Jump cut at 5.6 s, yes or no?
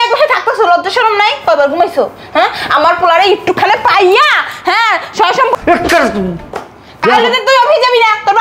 yes